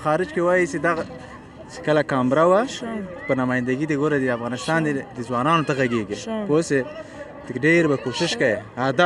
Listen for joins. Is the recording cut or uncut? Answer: uncut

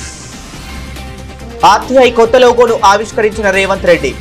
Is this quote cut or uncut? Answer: cut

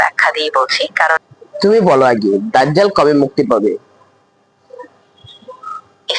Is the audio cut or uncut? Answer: cut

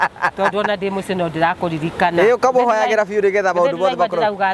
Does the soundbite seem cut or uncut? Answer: uncut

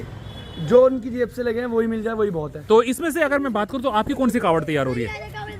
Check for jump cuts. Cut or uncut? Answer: cut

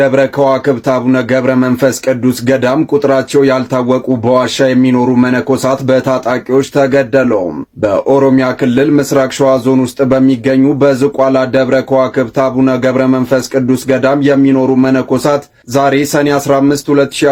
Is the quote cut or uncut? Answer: uncut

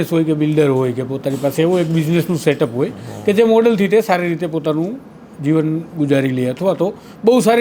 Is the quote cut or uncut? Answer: uncut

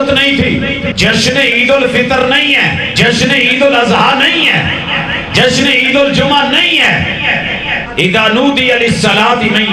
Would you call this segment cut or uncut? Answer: cut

